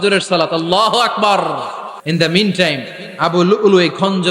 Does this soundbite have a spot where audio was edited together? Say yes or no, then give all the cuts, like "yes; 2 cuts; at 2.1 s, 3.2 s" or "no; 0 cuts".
yes; 1 cut; at 2.0 s